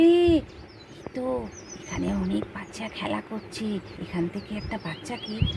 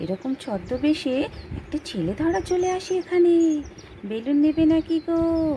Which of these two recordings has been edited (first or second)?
first